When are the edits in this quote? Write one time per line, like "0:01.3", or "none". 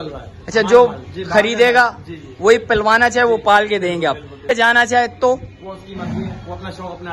0:04.5